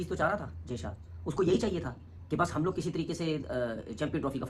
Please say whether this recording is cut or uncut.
uncut